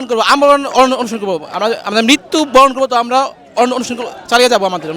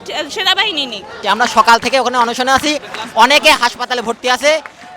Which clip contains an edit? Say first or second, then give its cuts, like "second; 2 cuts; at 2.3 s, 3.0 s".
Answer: second; 1 cut; at 1.1 s